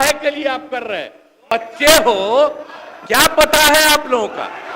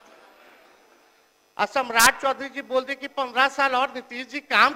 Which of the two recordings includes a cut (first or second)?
first